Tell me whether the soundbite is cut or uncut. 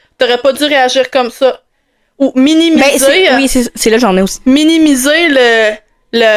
uncut